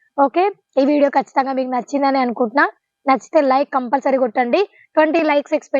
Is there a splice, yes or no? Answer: no